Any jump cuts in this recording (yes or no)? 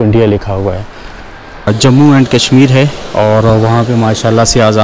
yes